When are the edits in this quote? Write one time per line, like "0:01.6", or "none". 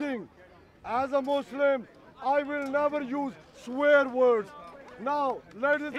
none